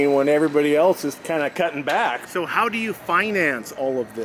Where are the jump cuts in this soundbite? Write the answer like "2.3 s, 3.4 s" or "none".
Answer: 2.2 s